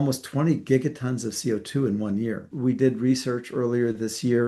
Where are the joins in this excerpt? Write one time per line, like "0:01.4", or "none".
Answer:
0:02.5